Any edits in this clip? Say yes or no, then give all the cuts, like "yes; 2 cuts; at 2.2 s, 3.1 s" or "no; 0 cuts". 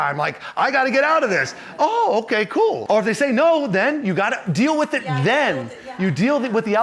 yes; 1 cut; at 2.8 s